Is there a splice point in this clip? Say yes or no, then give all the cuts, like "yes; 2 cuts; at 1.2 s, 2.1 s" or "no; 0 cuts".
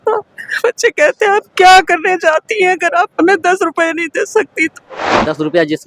yes; 1 cut; at 5.0 s